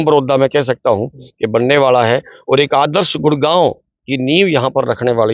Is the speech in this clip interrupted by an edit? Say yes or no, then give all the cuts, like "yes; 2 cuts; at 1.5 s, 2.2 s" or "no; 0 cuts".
no; 0 cuts